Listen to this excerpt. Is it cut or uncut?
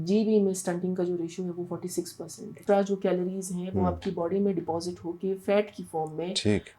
cut